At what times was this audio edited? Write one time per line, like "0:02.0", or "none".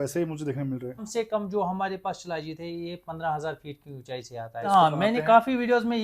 0:01.1
0:04.7